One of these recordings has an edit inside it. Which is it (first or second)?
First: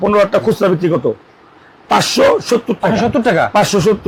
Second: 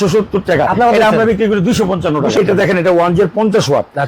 second